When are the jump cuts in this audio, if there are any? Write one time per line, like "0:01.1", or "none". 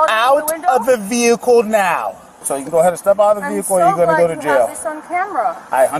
0:02.4